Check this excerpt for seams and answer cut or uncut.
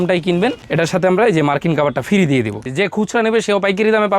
cut